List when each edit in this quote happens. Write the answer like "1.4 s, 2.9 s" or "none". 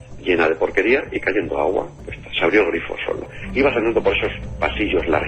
3.3 s